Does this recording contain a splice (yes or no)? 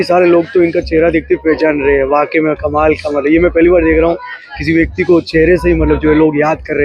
no